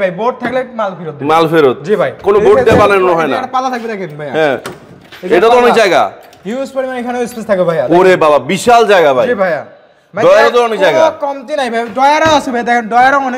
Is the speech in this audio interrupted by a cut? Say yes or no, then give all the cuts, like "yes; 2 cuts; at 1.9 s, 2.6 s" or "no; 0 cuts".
no; 0 cuts